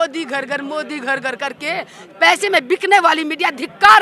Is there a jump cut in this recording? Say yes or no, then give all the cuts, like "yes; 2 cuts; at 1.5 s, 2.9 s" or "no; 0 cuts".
no; 0 cuts